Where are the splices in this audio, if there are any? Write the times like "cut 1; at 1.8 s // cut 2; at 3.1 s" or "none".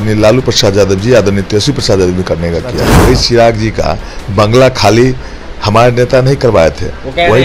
cut 1; at 3.0 s